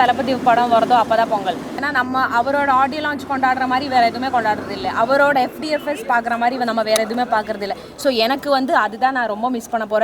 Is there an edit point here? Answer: yes; 1 cut; at 1.8 s

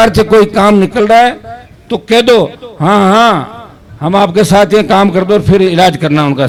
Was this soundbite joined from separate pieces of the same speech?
no; 0 cuts

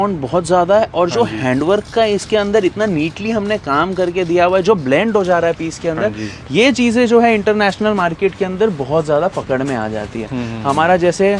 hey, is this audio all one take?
yes; 0 cuts

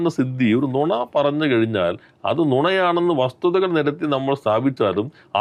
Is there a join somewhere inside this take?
no; 0 cuts

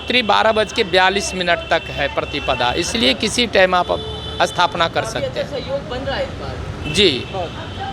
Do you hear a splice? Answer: no; 0 cuts

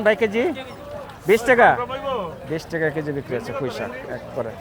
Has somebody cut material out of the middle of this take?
no; 0 cuts

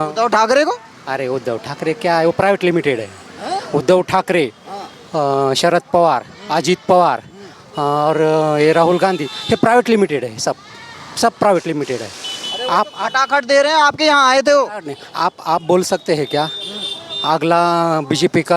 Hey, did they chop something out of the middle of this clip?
no; 0 cuts

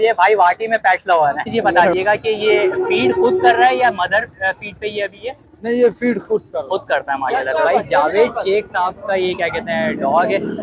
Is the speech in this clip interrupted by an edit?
yes; 2 cuts; at 1.4 s, 7.3 s

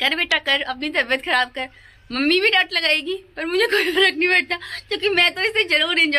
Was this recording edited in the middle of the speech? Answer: no; 0 cuts

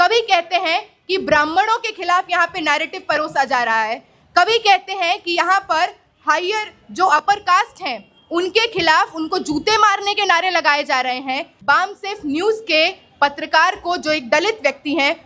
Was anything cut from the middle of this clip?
yes; 1 cut; at 11.5 s

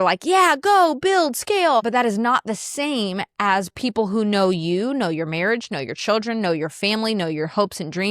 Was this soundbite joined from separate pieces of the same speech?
yes; 1 cut; at 1.9 s

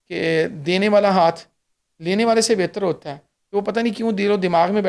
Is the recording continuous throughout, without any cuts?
yes; 0 cuts

